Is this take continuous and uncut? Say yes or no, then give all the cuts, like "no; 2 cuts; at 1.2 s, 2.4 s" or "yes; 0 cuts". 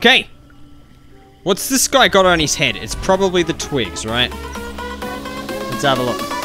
yes; 0 cuts